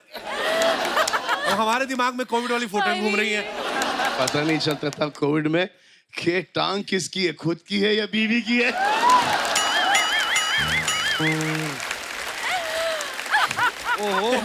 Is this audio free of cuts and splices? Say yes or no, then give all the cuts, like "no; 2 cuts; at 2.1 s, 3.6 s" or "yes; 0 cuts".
yes; 0 cuts